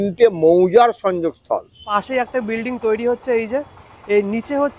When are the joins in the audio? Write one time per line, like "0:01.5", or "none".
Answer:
0:01.9

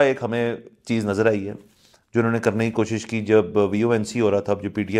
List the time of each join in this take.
none

